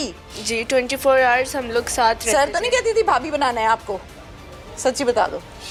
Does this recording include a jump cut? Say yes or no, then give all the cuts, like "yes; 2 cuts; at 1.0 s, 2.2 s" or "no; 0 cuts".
no; 0 cuts